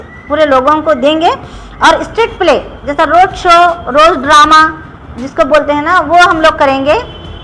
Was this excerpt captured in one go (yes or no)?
yes